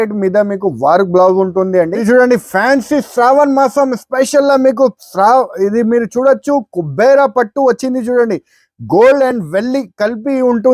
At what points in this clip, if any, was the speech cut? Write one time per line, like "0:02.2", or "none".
0:01.9